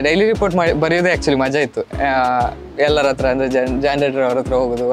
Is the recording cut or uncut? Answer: uncut